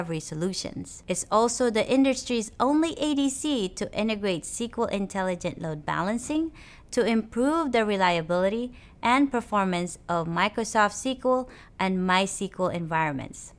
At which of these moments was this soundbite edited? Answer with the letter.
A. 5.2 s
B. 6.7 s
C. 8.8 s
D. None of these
C